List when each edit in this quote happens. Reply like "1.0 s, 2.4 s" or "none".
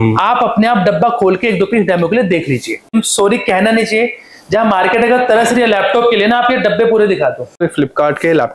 2.9 s, 7.6 s